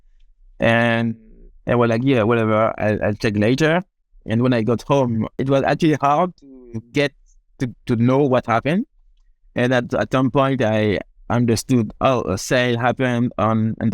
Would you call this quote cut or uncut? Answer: cut